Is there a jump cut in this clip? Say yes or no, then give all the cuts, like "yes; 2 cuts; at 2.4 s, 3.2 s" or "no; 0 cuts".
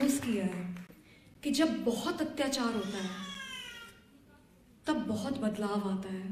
no; 0 cuts